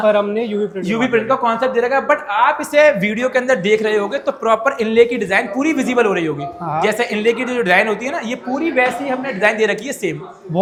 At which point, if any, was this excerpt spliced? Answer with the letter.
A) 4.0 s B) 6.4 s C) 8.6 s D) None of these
D